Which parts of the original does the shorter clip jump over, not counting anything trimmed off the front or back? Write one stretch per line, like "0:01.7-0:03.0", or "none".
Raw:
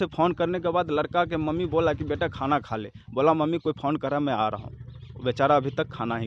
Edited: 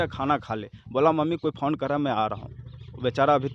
none